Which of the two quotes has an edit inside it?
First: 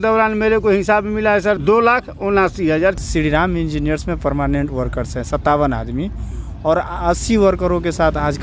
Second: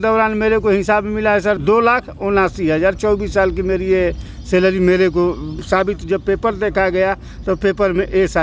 first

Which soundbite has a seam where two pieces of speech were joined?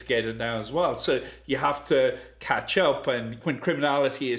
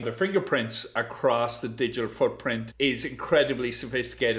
second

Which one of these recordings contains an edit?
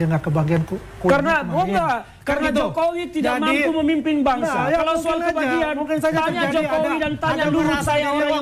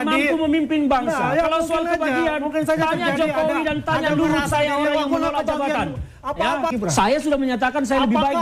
second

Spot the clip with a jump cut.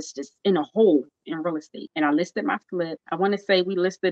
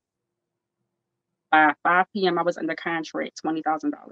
first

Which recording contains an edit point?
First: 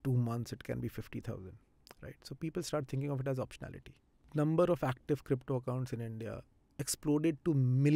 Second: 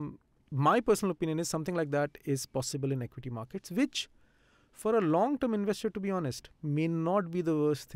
first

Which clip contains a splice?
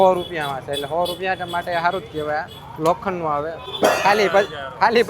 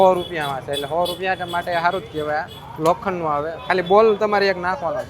first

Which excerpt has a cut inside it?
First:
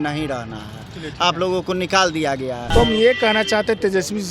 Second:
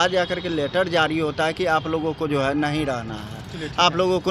first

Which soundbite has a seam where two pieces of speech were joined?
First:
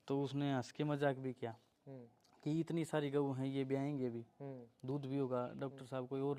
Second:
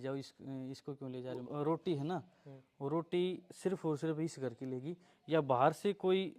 second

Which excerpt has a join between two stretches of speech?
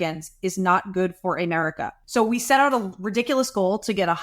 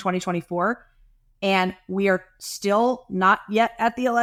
first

